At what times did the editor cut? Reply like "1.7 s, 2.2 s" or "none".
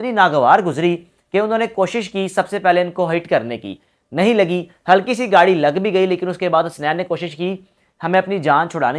none